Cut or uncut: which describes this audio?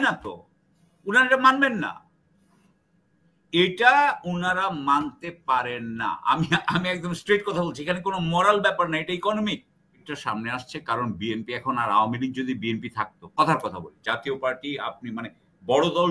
uncut